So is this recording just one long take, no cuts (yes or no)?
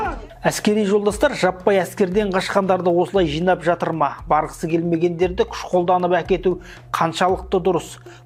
yes